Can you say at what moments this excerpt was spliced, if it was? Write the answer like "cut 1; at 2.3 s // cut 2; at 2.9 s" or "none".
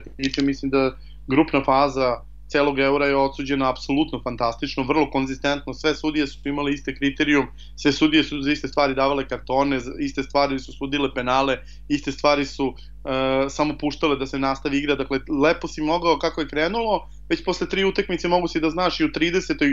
none